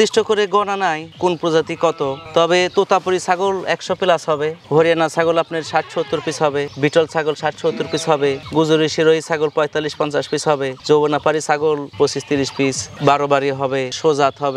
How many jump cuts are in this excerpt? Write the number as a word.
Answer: zero